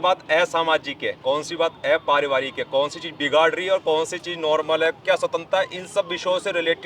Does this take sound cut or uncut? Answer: uncut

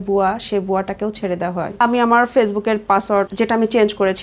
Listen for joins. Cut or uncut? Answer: cut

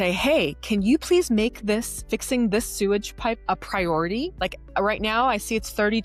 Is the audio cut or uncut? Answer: uncut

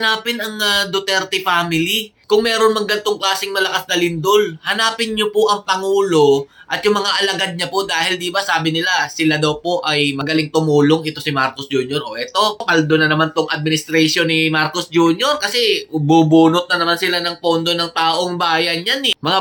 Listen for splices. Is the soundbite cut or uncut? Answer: uncut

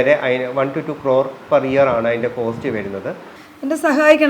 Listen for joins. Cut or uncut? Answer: cut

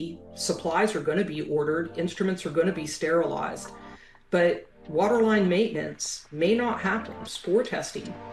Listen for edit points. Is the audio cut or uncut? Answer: uncut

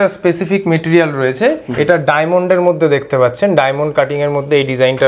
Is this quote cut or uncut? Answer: uncut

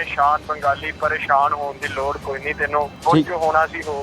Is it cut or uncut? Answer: cut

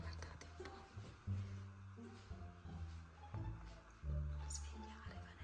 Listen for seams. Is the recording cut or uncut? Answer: uncut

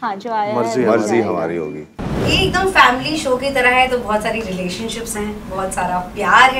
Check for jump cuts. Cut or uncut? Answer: cut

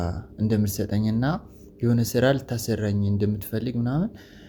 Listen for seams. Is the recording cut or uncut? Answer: uncut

